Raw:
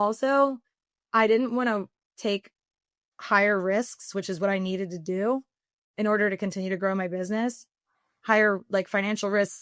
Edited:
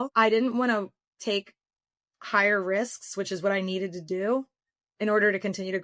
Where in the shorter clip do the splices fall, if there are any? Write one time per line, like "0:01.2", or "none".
none